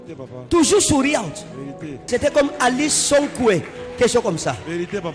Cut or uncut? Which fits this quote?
cut